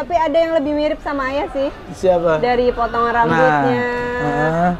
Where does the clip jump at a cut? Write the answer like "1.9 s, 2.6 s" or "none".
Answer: none